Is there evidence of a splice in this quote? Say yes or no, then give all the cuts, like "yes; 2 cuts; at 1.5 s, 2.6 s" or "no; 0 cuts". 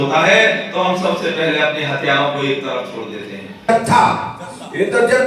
yes; 1 cut; at 3.7 s